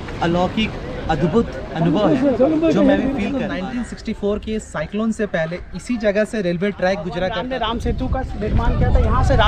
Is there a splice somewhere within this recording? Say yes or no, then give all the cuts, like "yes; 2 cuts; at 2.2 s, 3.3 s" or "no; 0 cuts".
yes; 2 cuts; at 3.5 s, 7.3 s